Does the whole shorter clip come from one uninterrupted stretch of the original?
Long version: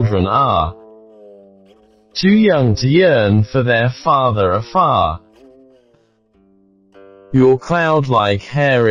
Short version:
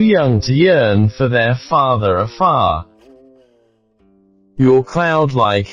no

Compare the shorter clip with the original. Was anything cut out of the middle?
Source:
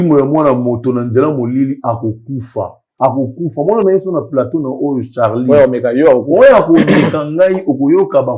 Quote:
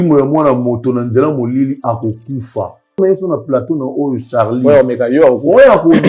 yes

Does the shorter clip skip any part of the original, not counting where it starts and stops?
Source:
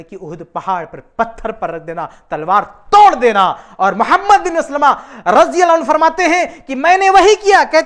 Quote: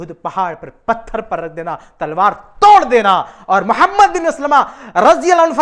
no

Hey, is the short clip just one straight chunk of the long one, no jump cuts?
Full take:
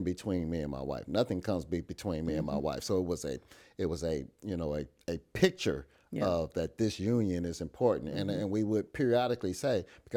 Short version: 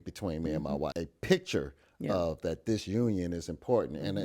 no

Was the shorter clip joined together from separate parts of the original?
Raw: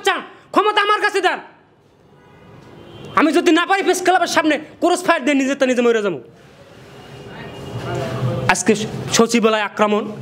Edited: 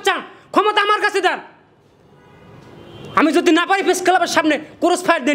no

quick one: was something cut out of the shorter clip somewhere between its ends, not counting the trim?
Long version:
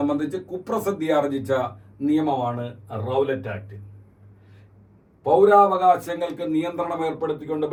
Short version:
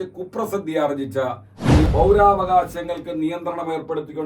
yes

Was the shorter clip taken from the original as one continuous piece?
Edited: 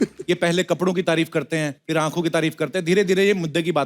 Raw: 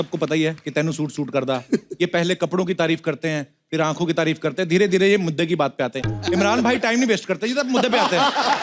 no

